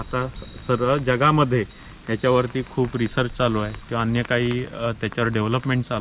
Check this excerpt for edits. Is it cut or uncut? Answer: uncut